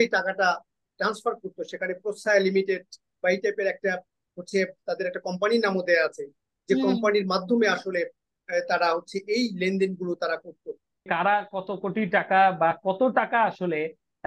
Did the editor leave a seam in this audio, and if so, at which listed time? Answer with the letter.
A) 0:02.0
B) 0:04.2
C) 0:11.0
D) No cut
C